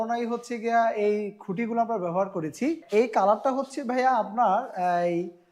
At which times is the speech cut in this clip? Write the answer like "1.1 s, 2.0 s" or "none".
2.8 s